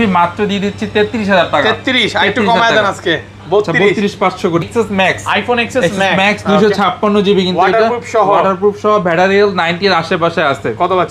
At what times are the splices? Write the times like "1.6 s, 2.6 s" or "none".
4.6 s